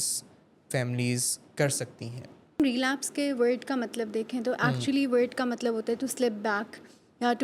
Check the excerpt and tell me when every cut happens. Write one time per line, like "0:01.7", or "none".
0:02.6